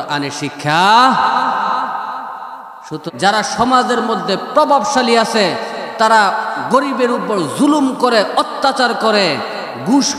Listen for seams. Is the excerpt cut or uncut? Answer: cut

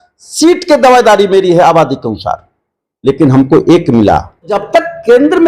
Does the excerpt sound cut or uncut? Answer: cut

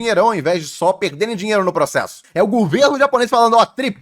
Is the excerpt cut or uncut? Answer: cut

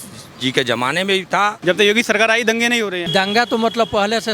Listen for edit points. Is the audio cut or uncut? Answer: cut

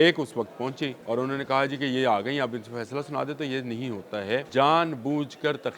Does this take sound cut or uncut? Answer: cut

